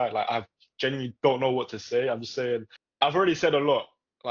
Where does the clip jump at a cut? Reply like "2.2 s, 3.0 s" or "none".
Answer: 2.8 s